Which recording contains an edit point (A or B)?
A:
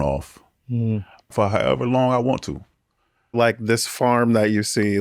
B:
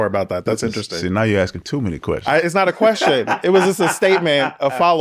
A